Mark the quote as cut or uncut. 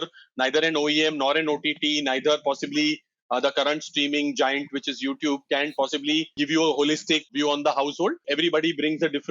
cut